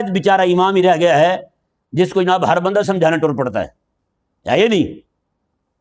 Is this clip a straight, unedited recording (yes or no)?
yes